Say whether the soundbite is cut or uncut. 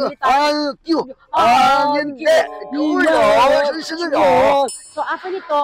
cut